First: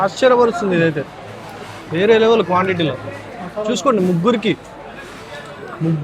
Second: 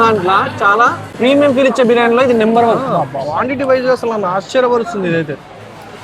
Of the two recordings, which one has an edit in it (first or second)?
second